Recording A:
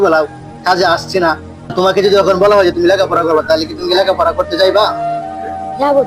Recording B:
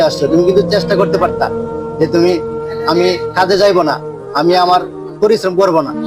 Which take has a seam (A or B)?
A